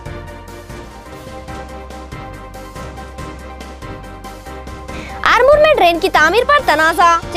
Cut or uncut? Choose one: cut